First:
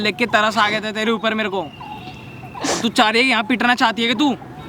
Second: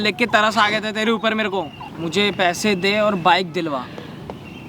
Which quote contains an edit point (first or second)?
second